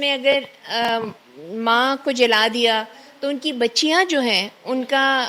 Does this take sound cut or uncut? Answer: uncut